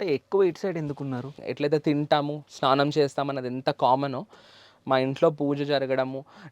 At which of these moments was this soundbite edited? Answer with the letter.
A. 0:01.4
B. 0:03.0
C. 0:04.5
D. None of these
A